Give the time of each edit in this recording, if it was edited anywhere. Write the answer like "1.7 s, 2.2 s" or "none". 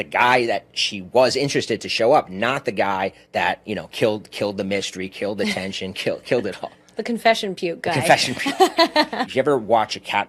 3.2 s, 9.2 s